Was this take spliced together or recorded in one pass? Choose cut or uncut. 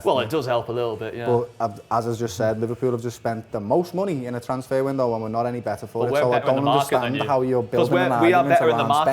uncut